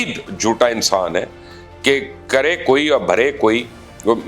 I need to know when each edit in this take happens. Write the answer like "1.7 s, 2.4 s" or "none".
none

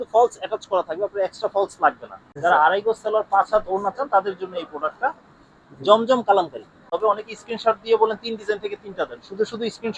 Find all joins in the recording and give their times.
2.1 s, 7.0 s

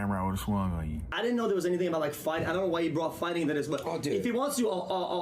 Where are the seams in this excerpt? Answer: 1.1 s

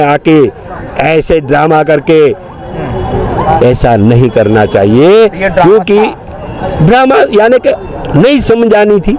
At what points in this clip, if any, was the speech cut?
none

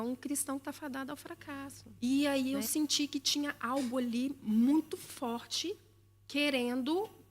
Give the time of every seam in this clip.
1.8 s

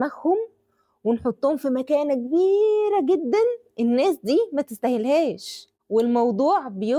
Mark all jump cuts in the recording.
5.7 s

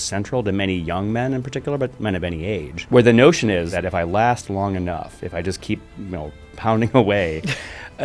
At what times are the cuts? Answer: 2.7 s, 3.7 s

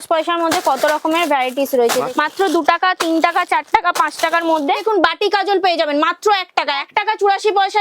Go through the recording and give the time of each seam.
2.1 s, 4.8 s, 6.9 s

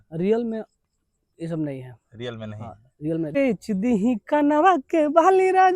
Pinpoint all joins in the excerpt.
3.4 s

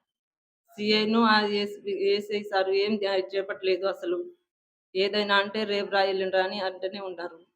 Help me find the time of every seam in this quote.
2.4 s

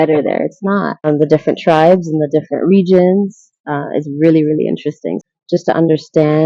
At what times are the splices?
1.0 s, 5.2 s

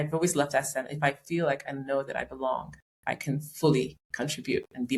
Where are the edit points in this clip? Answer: none

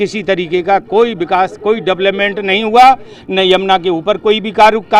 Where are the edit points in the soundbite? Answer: none

